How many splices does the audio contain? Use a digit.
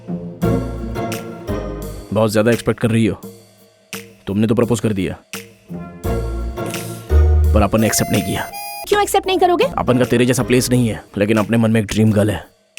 3